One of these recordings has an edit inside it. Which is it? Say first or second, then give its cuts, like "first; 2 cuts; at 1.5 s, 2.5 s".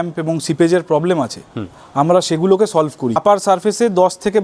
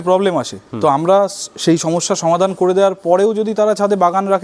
first; 1 cut; at 3.2 s